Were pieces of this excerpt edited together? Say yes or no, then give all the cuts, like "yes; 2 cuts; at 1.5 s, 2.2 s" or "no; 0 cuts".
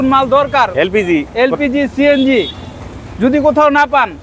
no; 0 cuts